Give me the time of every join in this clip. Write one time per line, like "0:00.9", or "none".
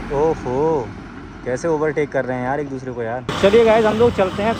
none

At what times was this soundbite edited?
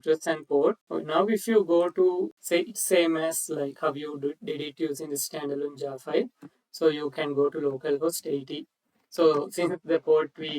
0:00.8
0:02.4

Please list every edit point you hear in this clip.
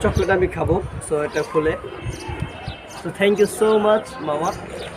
0:03.0

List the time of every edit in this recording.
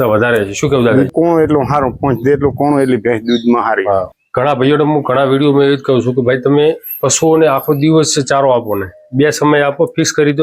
0:01.1
0:04.2

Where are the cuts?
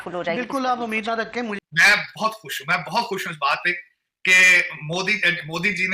0:01.6

